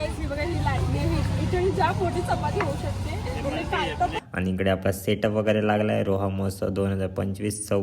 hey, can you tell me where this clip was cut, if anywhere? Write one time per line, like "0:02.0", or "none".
0:04.2